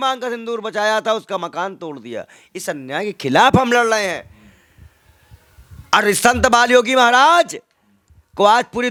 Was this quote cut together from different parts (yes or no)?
no